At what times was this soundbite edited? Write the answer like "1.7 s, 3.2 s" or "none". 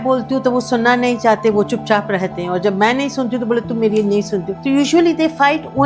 4.5 s